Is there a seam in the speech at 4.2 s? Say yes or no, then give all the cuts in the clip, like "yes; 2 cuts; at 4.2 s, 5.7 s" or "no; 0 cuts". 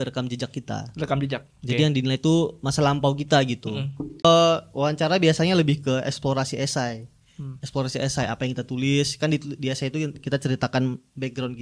yes; 1 cut; at 4.2 s